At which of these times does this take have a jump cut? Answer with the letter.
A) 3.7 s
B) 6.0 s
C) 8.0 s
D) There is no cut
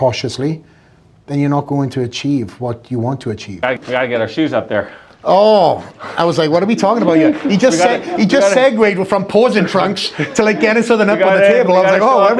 A